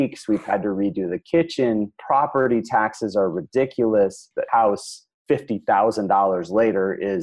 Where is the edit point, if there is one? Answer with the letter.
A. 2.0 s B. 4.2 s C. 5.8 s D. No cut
B